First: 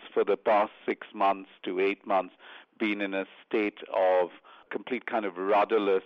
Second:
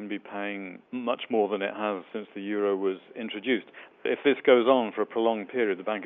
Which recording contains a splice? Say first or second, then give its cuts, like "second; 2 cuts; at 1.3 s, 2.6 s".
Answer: second; 1 cut; at 4.0 s